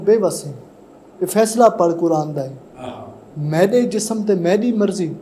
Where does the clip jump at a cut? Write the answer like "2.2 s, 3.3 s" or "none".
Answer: none

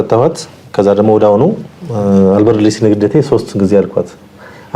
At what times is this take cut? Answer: none

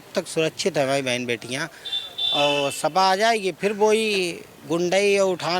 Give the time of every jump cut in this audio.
none

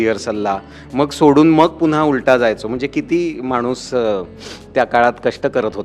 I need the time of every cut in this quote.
none

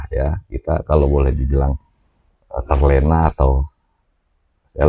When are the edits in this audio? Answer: none

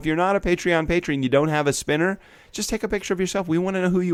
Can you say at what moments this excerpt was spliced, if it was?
none

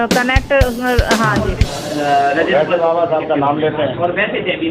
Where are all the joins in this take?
1.6 s

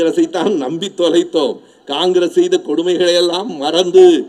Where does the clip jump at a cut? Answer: none

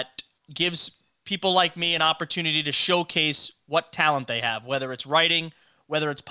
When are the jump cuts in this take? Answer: none

